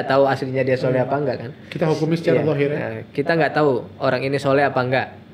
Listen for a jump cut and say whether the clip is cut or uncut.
uncut